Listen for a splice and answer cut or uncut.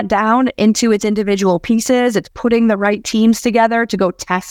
uncut